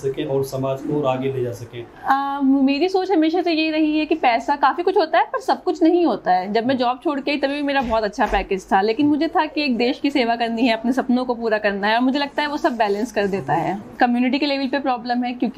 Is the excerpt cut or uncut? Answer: cut